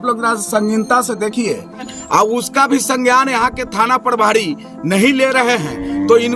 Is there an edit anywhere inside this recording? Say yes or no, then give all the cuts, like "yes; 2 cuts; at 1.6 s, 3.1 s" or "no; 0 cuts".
yes; 1 cut; at 1.9 s